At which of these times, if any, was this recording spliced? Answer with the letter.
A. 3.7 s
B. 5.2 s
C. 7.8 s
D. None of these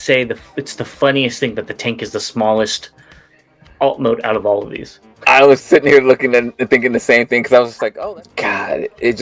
C